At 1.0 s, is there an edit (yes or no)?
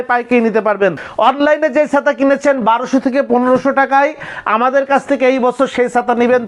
yes